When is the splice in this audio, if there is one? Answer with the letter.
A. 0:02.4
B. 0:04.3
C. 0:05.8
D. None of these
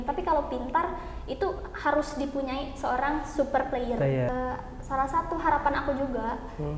B